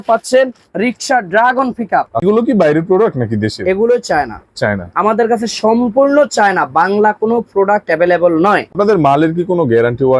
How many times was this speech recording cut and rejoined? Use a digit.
2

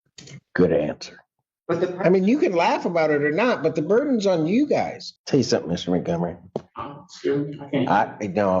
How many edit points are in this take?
2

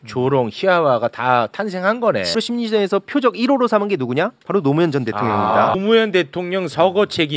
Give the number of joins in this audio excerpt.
2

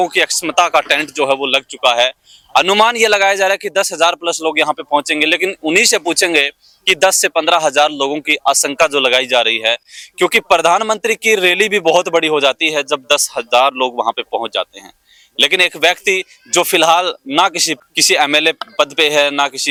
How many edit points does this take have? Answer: 0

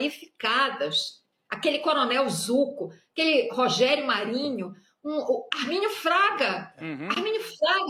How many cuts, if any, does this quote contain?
0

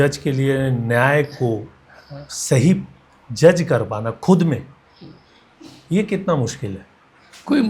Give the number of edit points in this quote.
0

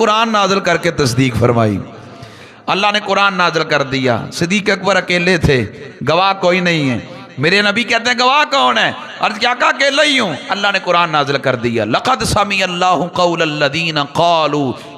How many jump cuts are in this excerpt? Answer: 0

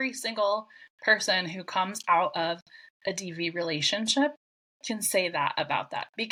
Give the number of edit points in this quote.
0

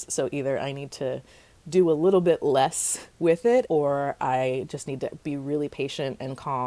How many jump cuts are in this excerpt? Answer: 1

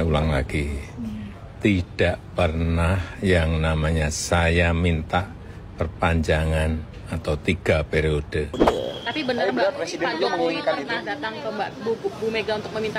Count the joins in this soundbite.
1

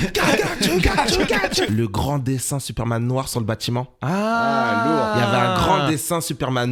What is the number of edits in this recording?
1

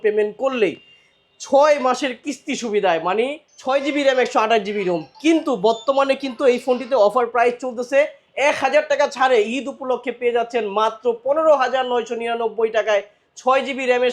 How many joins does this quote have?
1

